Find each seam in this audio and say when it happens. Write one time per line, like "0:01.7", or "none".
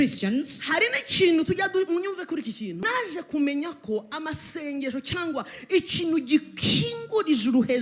0:02.9